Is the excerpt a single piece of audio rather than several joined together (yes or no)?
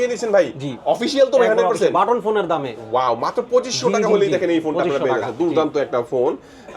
yes